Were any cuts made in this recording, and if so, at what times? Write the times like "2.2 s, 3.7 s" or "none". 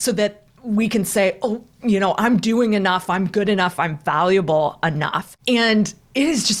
5.3 s

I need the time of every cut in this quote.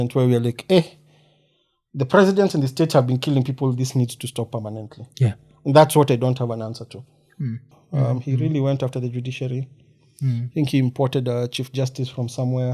7.7 s

